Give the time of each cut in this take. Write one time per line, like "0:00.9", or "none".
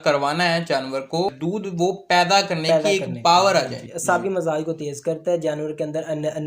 0:01.4
0:03.8